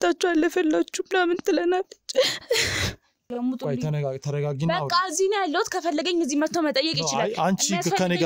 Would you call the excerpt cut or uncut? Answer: cut